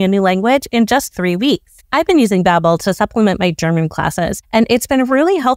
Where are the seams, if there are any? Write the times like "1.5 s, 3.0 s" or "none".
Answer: 1.7 s